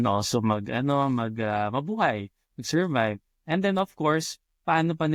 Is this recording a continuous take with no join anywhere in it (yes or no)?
yes